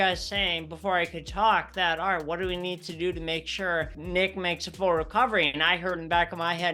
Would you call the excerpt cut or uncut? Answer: cut